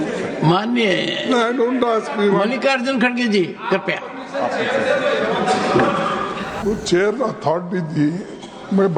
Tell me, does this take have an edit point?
yes; 1 cut; at 6.6 s

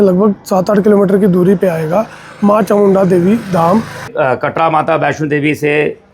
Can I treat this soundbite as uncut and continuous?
no; 1 cut; at 4.1 s

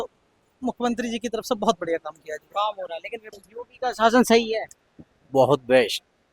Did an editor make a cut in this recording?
yes; 1 cut; at 3.3 s

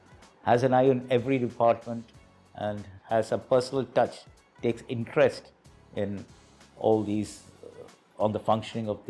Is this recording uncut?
yes; 0 cuts

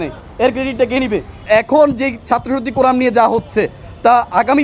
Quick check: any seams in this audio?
yes; 1 cut; at 1.5 s

